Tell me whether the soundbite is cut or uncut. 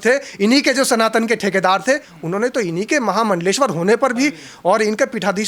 uncut